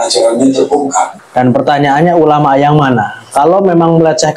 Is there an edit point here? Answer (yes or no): yes